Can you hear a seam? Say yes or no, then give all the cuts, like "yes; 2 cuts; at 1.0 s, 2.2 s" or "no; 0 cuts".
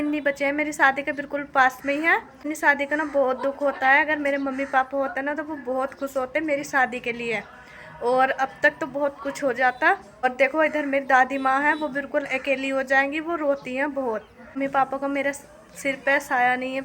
yes; 3 cuts; at 2.5 s, 10.2 s, 14.6 s